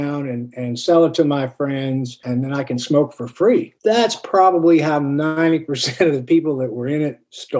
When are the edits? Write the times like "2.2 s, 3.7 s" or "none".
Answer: 2.2 s, 3.7 s